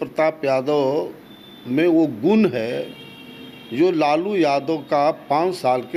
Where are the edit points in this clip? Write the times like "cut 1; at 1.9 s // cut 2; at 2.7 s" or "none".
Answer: none

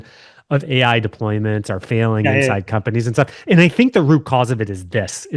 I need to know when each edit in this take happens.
none

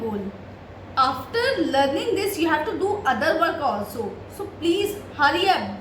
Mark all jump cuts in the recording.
none

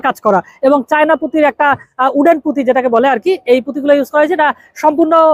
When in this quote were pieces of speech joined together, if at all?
none

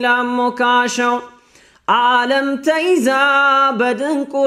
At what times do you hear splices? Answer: none

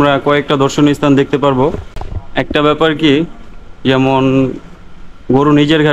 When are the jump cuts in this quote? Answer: cut 1; at 1.9 s

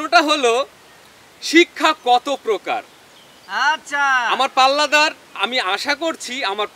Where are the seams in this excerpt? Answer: none

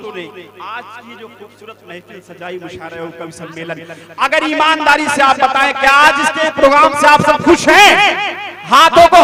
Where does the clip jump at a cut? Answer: none

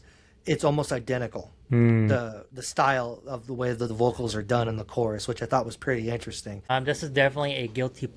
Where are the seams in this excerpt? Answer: cut 1; at 6.7 s

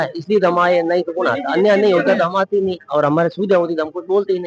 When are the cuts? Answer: none

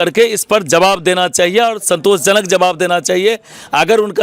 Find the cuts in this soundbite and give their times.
none

